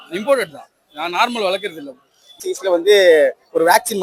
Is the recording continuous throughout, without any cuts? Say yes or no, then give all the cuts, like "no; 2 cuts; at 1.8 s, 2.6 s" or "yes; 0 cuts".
no; 1 cut; at 2.4 s